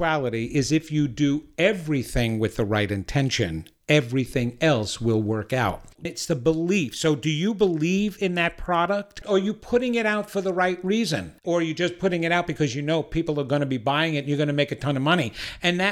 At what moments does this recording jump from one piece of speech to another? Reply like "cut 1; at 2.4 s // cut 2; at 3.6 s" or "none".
cut 1; at 6.0 s // cut 2; at 9.2 s // cut 3; at 11.4 s